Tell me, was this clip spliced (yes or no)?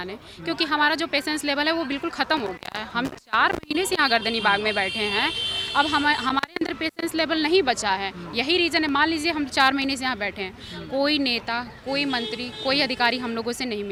no